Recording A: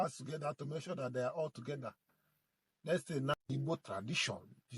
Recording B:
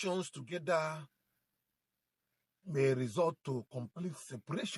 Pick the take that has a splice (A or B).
A